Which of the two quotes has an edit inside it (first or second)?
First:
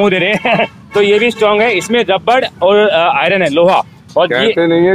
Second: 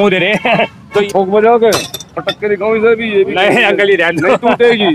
second